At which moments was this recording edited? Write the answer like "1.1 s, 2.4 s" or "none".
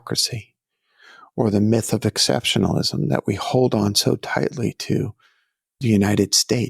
5.8 s